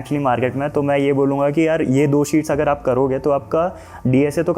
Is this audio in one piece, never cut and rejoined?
yes; 0 cuts

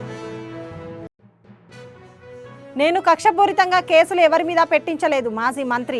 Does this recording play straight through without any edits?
no; 2 cuts; at 1.0 s, 2.1 s

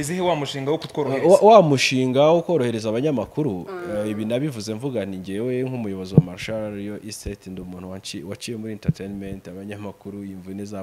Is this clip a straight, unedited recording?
yes; 0 cuts

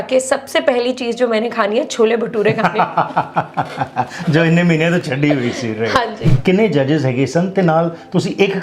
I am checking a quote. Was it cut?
yes; 1 cut; at 6.2 s

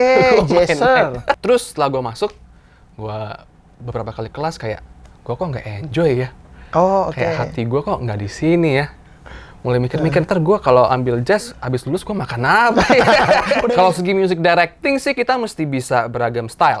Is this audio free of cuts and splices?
no; 2 cuts; at 1.4 s, 13.6 s

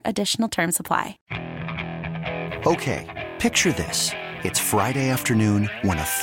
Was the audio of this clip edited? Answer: yes; 1 cut; at 1.2 s

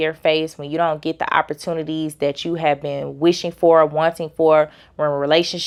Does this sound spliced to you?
no; 0 cuts

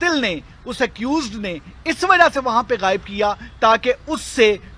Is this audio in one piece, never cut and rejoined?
yes; 0 cuts

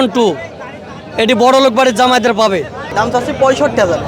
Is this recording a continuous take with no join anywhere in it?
no; 1 cut; at 2.8 s

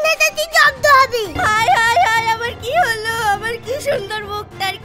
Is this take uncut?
no; 1 cut; at 1.3 s

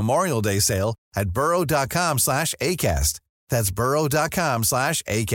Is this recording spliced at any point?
no; 0 cuts

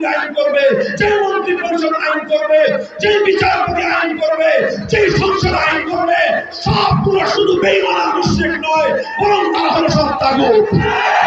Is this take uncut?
yes; 0 cuts

